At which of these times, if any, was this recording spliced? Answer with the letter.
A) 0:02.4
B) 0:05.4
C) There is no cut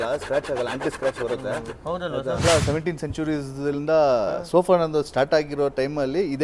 A